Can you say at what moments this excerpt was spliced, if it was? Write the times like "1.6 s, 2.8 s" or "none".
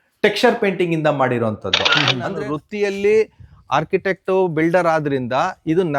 2.1 s

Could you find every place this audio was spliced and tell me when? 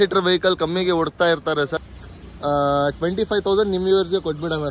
1.8 s

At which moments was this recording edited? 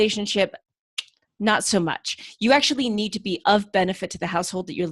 none

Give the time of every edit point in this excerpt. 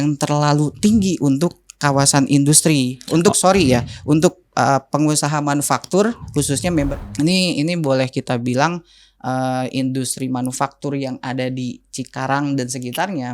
6.9 s

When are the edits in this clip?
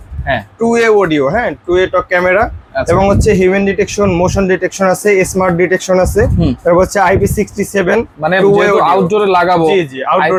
none

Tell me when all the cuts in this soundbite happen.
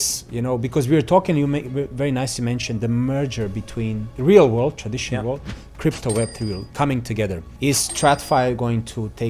4.1 s, 7.5 s

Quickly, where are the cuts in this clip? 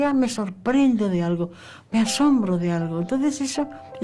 none

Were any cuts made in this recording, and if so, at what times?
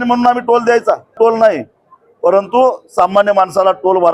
1.2 s

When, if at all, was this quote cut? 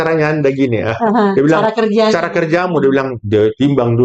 none

